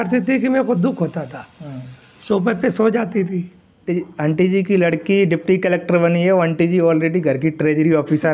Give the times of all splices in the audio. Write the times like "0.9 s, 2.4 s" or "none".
3.6 s